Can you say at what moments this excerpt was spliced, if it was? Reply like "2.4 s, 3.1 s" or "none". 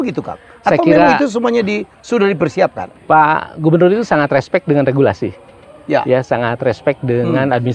2.9 s